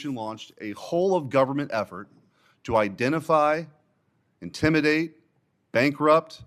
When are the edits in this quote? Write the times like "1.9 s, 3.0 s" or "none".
none

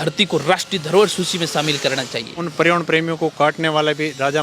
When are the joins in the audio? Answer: 2.4 s

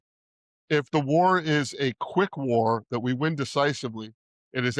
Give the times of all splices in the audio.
none

